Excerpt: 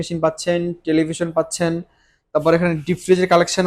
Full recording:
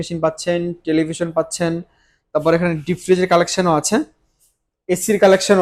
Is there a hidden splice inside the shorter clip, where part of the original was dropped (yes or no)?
no